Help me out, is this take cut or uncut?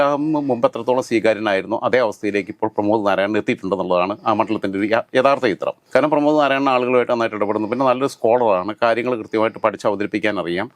uncut